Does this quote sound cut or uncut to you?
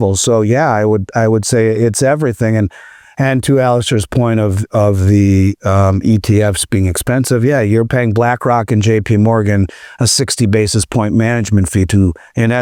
uncut